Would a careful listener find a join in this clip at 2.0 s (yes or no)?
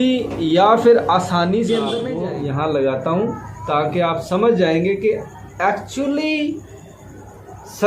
yes